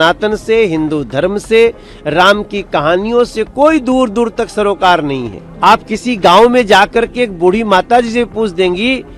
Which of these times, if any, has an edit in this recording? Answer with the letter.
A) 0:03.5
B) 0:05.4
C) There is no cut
B